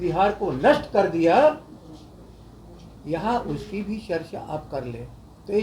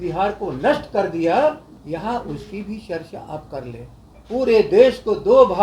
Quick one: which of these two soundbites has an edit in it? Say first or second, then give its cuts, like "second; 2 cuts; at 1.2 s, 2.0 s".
second; 2 cuts; at 1.7 s, 4.1 s